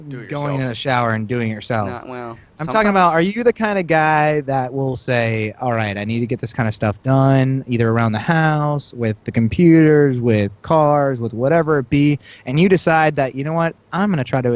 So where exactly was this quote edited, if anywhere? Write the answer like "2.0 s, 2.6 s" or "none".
2.3 s